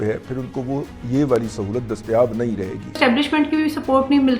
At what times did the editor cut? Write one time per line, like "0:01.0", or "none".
0:03.0